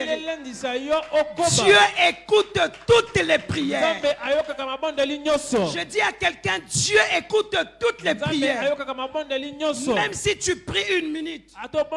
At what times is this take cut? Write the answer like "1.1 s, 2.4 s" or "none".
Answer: none